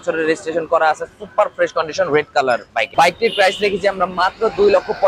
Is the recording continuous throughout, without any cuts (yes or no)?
no